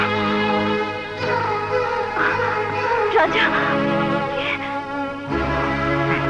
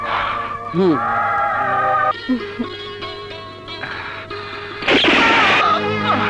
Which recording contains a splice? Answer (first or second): second